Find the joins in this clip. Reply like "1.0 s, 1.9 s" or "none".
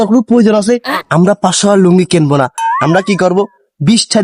0.9 s